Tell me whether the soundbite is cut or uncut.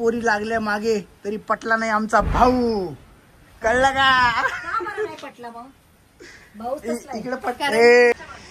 uncut